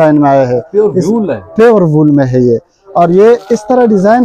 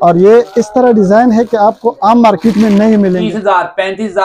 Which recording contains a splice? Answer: second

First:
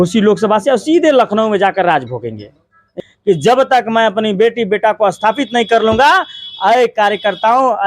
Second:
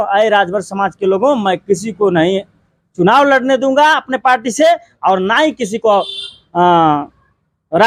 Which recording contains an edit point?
first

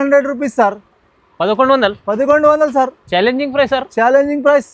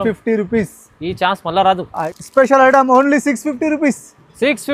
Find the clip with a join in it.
second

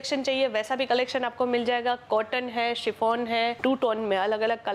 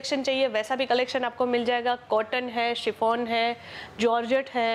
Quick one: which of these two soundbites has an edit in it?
first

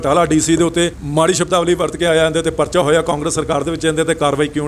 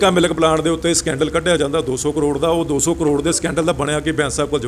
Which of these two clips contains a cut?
first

